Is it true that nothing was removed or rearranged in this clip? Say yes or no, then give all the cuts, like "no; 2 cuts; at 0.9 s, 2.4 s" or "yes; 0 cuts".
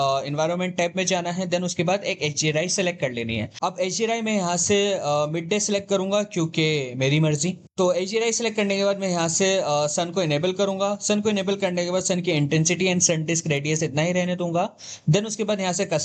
yes; 0 cuts